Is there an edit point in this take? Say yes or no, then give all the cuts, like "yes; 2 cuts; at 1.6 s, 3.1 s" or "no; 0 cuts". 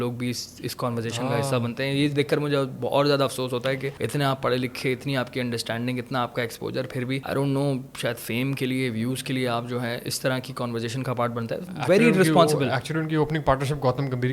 yes; 3 cuts; at 3.9 s, 7.2 s, 11.7 s